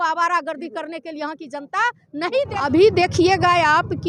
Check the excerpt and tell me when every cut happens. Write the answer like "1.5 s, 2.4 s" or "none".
2.6 s